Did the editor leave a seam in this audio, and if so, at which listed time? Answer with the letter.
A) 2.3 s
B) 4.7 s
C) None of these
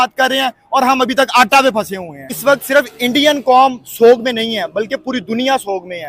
A